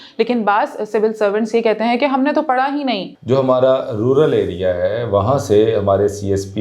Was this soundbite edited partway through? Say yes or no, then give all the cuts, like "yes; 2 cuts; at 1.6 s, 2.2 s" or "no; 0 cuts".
yes; 1 cut; at 3.1 s